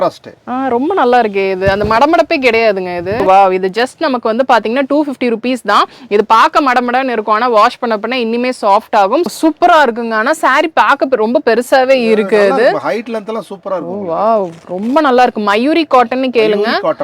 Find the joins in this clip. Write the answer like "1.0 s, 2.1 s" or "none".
3.2 s, 9.3 s